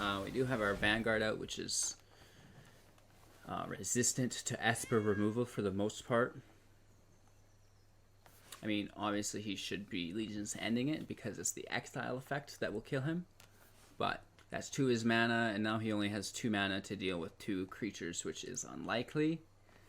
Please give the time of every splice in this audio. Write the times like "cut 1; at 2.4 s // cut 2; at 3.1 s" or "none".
cut 1; at 14.3 s